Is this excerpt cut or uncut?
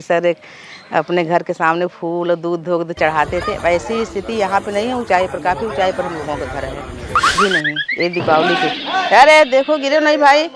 cut